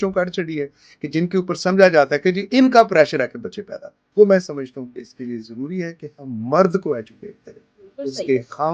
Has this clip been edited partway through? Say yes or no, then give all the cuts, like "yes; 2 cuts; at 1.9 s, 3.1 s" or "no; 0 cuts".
no; 0 cuts